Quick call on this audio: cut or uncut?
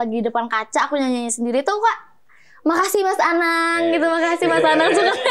uncut